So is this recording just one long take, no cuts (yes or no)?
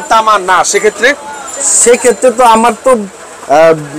yes